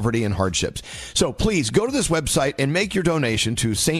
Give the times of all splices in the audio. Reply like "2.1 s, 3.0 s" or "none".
none